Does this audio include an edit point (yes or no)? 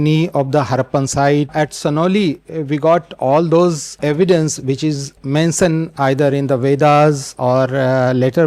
yes